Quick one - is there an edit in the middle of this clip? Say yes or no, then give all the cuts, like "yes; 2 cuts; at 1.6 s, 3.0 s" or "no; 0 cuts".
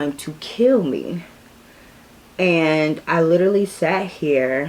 no; 0 cuts